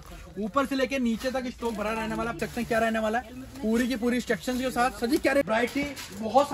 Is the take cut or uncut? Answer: cut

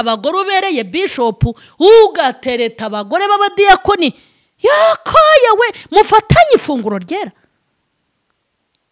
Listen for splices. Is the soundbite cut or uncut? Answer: uncut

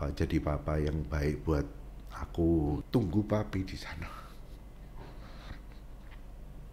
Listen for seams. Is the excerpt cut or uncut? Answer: cut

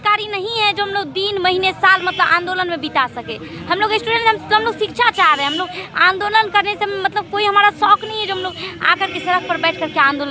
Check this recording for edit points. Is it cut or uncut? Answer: uncut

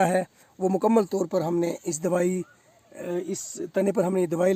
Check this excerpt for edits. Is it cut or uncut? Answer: uncut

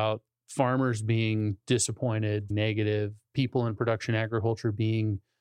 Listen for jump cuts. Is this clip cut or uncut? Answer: cut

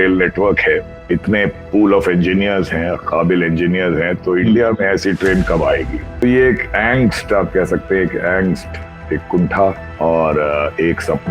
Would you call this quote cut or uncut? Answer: cut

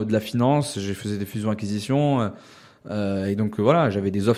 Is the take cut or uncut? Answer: uncut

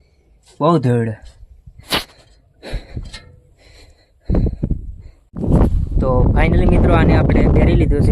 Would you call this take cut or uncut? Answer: cut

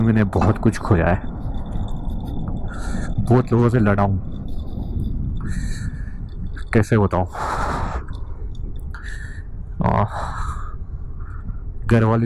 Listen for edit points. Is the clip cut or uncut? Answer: uncut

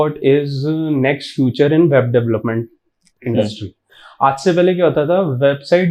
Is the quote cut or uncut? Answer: uncut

